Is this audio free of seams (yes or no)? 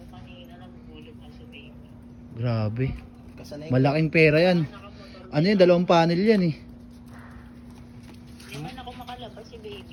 yes